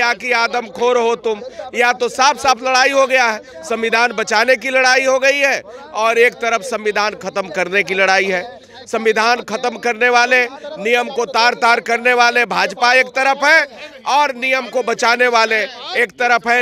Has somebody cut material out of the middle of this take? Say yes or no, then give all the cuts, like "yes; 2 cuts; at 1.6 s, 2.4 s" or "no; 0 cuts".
no; 0 cuts